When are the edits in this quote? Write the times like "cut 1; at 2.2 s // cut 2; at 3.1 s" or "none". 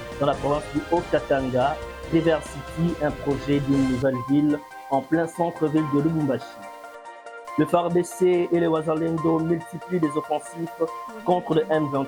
none

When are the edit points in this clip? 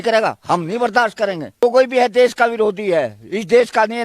cut 1; at 1.6 s

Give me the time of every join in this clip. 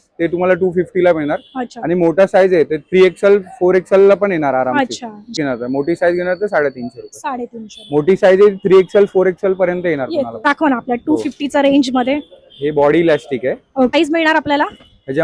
cut 1; at 5.3 s // cut 2; at 10.5 s // cut 3; at 13.9 s

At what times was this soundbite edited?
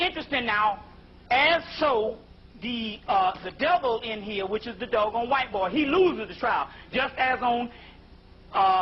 none

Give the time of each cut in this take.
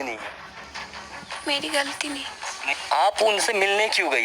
cut 1; at 2.8 s

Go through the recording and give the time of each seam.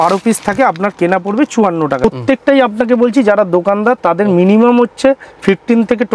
cut 1; at 2.0 s

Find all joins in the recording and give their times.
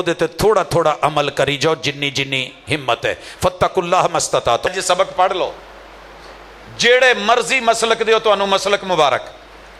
cut 1; at 4.7 s

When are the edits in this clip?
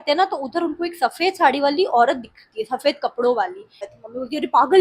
cut 1; at 3.9 s

